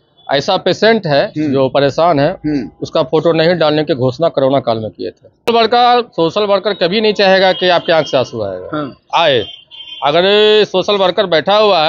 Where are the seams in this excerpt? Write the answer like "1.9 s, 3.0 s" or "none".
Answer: 5.5 s